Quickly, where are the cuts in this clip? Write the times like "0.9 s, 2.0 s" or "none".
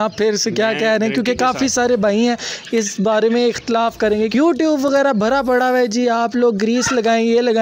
4.3 s